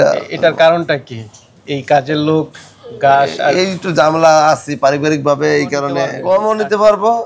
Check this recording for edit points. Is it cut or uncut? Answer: cut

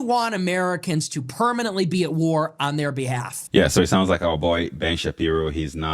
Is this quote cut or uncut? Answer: cut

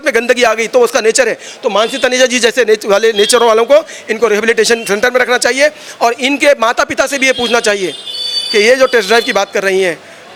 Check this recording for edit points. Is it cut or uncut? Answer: uncut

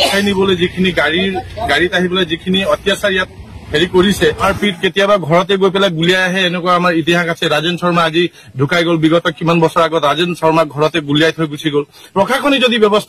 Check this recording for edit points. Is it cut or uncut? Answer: cut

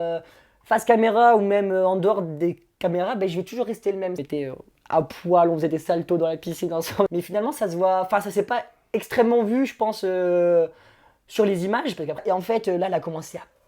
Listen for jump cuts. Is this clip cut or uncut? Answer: cut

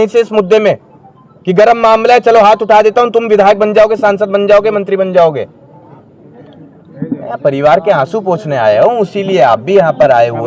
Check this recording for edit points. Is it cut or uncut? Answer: uncut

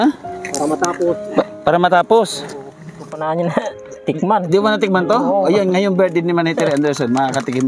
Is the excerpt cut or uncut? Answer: cut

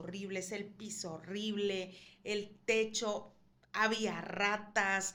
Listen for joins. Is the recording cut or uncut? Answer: uncut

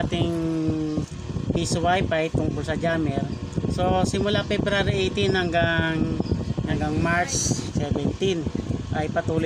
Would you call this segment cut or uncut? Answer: cut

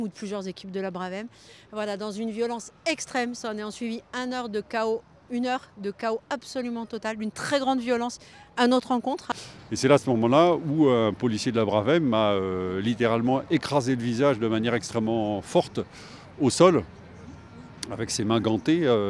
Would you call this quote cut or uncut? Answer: cut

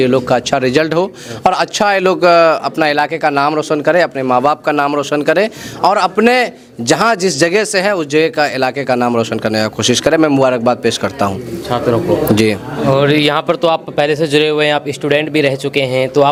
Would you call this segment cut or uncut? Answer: uncut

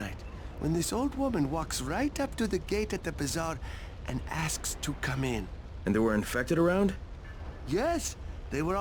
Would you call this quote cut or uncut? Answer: uncut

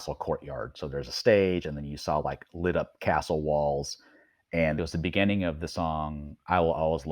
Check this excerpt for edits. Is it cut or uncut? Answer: cut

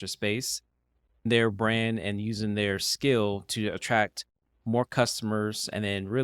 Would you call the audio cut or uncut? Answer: cut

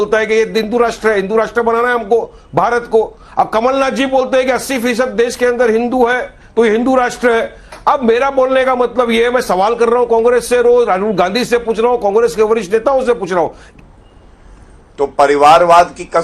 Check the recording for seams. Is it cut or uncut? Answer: cut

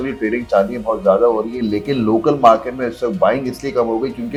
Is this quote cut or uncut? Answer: uncut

